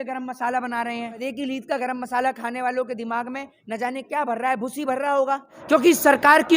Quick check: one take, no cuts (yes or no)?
no